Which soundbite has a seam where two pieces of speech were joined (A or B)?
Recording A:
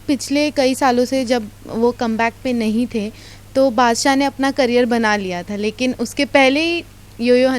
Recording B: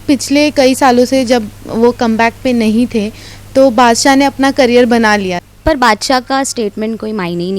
B